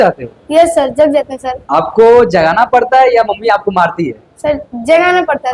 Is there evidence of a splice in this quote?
no; 0 cuts

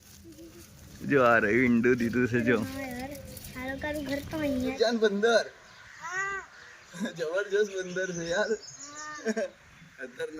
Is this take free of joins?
no; 1 cut; at 4.7 s

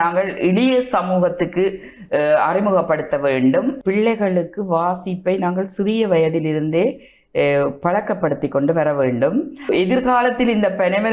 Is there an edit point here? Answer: yes; 2 cuts; at 3.8 s, 9.7 s

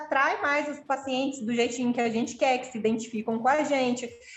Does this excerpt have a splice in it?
no; 0 cuts

